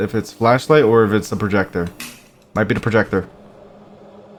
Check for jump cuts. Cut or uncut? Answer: uncut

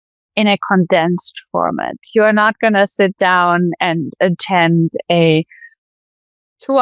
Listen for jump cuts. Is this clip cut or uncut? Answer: uncut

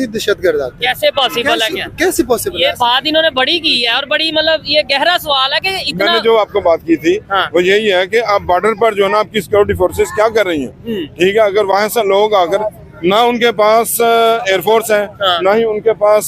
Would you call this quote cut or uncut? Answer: uncut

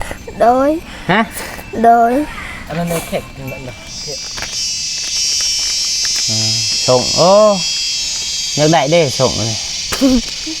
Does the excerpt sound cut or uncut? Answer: cut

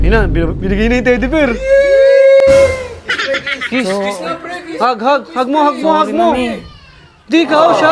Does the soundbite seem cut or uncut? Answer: uncut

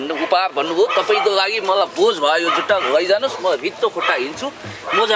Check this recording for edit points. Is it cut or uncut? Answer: uncut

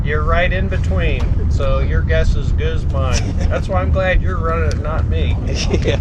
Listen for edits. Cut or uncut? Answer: uncut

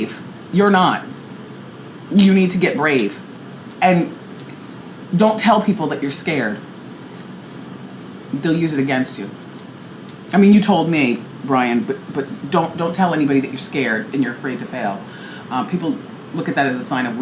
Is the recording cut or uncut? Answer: uncut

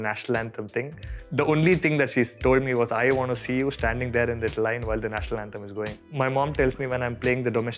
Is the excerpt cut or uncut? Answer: cut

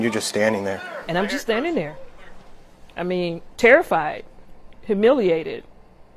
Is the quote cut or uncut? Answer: cut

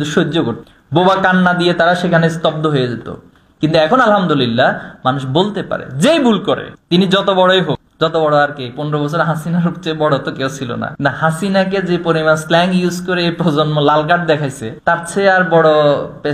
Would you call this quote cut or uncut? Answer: uncut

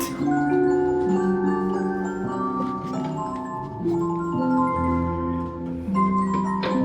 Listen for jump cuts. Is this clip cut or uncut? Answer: uncut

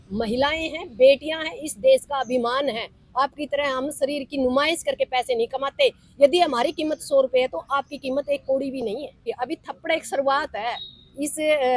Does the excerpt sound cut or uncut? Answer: cut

